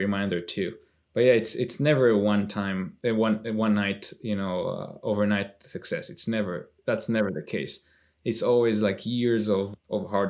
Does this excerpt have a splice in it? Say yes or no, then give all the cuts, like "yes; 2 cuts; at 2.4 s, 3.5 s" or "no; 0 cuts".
no; 0 cuts